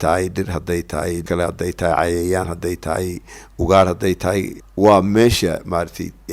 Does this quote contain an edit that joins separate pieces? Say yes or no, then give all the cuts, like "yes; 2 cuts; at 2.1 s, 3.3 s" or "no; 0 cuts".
yes; 2 cuts; at 1.2 s, 4.6 s